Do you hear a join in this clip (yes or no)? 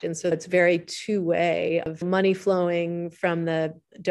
yes